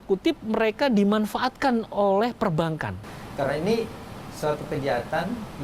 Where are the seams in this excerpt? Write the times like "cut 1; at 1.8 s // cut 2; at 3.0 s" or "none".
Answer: cut 1; at 3.0 s